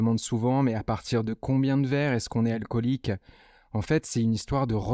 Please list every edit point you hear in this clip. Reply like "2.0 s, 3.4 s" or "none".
none